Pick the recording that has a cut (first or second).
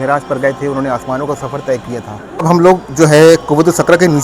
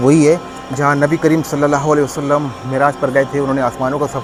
first